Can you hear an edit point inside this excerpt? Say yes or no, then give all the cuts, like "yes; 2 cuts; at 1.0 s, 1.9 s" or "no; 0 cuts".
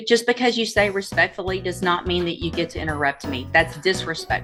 no; 0 cuts